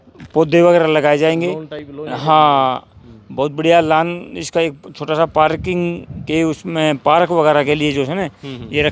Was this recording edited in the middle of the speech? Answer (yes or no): no